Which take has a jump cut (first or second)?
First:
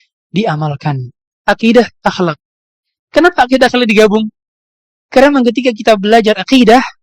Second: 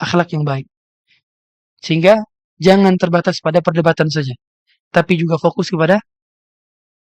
first